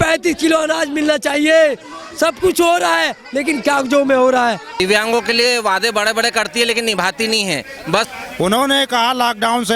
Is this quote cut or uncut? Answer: cut